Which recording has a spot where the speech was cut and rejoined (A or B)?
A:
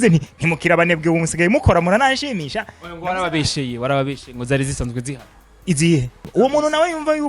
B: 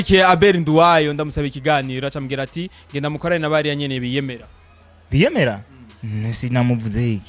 A